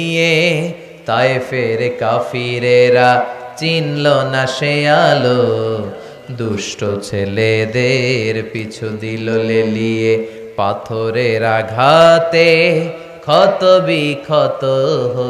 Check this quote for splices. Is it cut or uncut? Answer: uncut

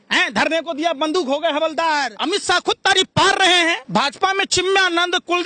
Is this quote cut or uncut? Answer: cut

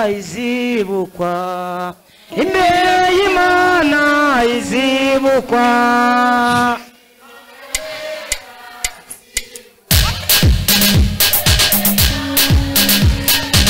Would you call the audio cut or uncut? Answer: uncut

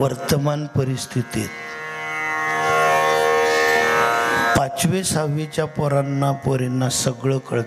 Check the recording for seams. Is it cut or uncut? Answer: uncut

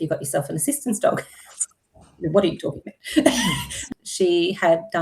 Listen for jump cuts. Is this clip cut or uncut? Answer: cut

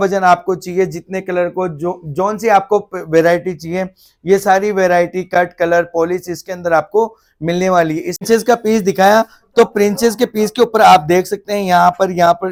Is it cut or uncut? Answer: uncut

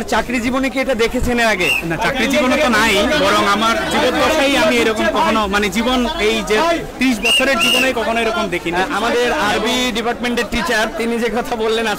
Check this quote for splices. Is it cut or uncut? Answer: uncut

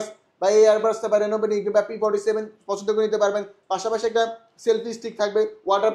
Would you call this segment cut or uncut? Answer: uncut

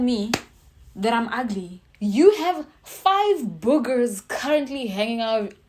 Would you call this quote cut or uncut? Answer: cut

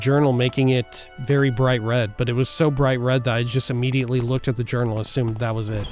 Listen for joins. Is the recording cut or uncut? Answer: uncut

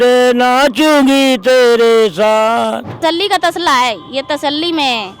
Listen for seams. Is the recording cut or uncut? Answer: cut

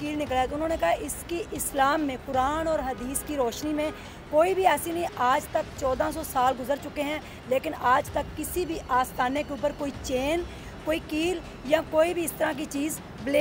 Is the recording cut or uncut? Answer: uncut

